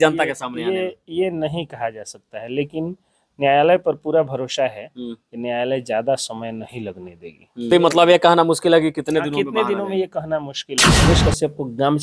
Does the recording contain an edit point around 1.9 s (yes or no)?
no